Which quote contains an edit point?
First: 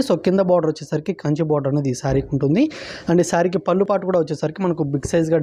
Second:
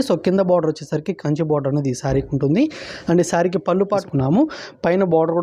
second; 1 cut; at 3.9 s

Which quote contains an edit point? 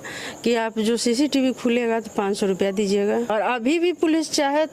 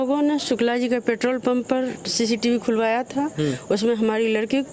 first; 1 cut; at 3.3 s

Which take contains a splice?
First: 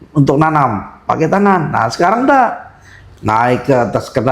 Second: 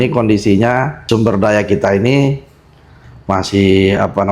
second; 1 cut; at 1.0 s

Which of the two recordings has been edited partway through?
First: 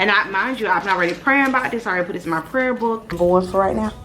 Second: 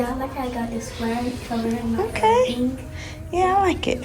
first; 1 cut; at 3.2 s

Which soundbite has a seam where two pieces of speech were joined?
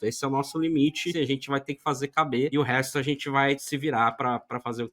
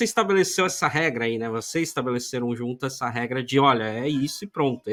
first; 3 cuts; at 1.1 s, 2.5 s, 3.7 s

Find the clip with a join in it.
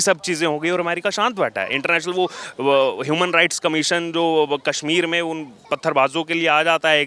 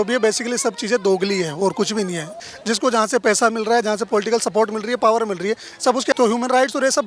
second; 2 cuts; at 2.4 s, 6.1 s

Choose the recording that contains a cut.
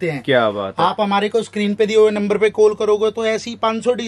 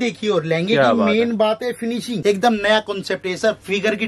second; 1 cut; at 2.1 s

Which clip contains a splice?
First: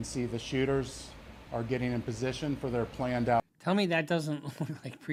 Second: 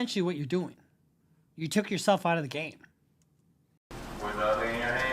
second; 1 cut; at 3.6 s

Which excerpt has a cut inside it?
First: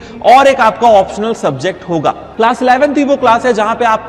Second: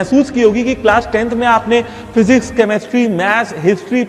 first; 1 cut; at 2.2 s

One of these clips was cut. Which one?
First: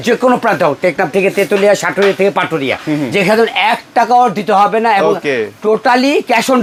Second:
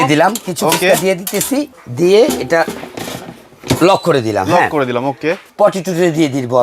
second; 2 cuts; at 1.8 s, 5.4 s

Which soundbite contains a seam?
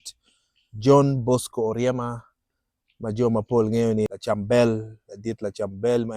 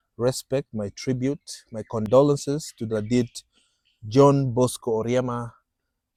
first; 1 cut; at 4.1 s

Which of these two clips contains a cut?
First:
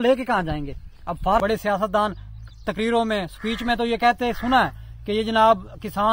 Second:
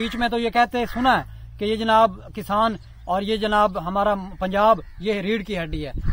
first; 1 cut; at 1.4 s

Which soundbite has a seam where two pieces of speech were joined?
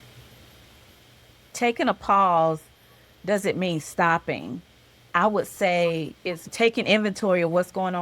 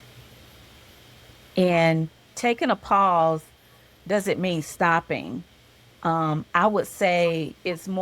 first; 3 cuts; at 1.4 s, 5.0 s, 6.5 s

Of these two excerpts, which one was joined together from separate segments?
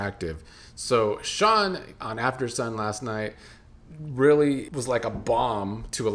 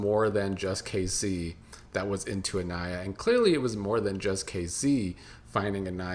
first; 1 cut; at 4.7 s

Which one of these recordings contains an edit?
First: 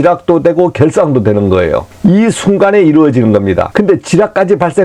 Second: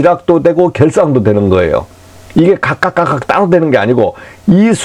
first; 2 cuts; at 1.9 s, 3.7 s

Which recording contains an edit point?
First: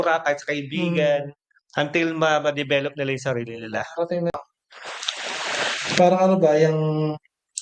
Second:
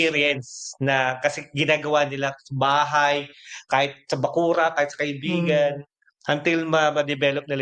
first; 1 cut; at 4.3 s

